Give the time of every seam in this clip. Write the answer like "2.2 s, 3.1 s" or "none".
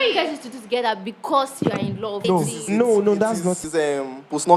2.2 s, 3.6 s